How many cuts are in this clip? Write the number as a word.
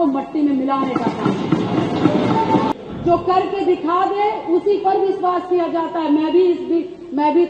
one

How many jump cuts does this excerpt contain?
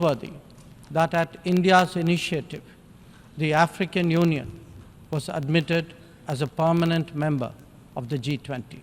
zero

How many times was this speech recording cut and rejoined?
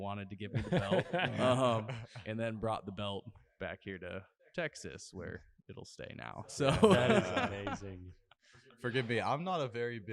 zero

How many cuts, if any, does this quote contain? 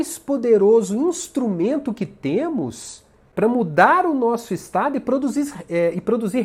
one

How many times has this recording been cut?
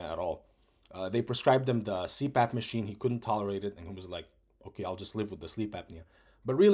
zero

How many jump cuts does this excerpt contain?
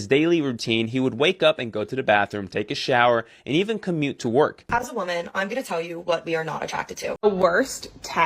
two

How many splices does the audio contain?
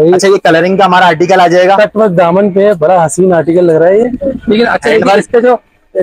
zero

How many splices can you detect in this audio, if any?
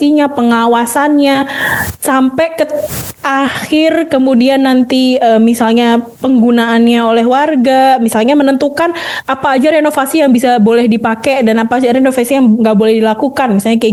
zero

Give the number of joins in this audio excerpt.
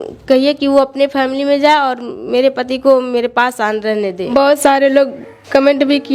one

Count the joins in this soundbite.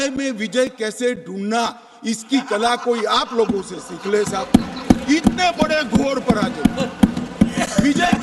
zero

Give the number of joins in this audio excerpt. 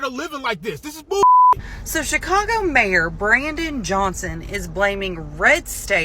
one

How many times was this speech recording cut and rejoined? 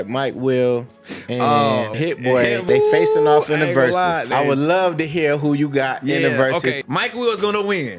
three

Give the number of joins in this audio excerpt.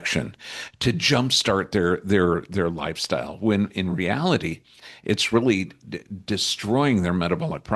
zero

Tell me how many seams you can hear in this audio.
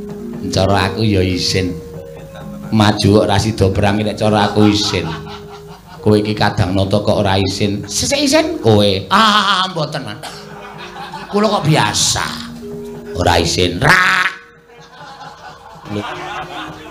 one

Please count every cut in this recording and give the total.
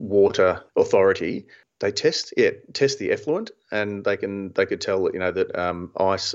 zero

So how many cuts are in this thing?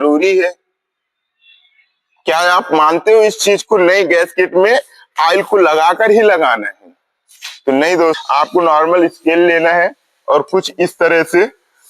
one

